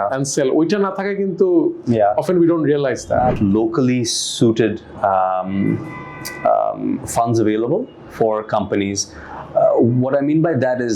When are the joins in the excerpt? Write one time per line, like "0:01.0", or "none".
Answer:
0:03.4